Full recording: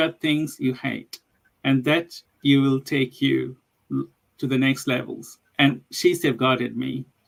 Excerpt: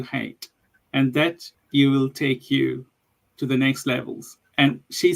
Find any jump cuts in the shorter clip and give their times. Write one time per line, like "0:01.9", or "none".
0:03.1